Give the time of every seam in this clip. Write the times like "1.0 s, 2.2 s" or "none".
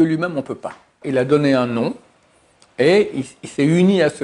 1.0 s